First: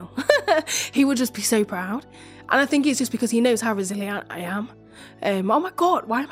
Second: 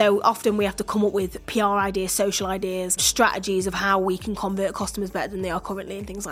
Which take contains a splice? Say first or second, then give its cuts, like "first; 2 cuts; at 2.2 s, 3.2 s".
second; 2 cuts; at 1.4 s, 3.0 s